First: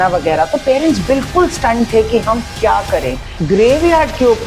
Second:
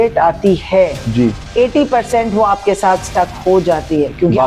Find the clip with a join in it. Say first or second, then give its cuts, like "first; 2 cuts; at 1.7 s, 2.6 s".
first; 1 cut; at 3.3 s